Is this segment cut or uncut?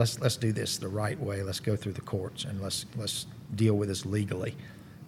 uncut